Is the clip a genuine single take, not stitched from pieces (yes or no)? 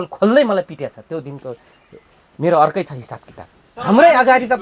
no